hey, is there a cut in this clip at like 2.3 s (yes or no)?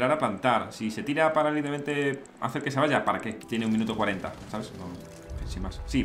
yes